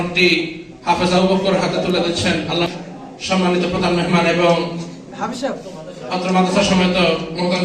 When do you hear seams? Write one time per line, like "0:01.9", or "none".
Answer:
0:02.7